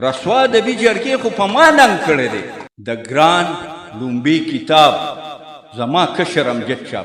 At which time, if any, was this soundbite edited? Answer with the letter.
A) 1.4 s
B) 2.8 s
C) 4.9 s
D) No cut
B